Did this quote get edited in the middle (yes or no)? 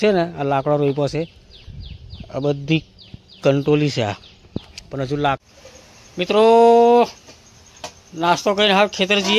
yes